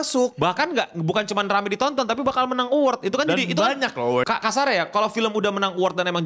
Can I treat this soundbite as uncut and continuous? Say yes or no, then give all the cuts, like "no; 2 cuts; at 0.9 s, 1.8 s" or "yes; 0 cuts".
no; 1 cut; at 4.3 s